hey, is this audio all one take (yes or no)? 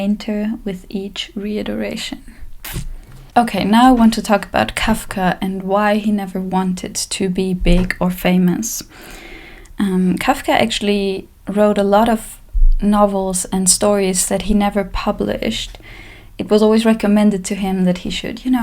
yes